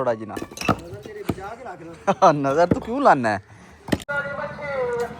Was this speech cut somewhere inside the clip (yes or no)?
yes